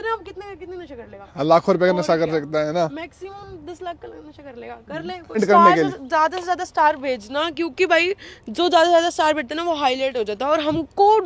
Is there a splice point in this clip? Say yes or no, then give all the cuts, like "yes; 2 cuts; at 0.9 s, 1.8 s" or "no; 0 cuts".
yes; 1 cut; at 5.4 s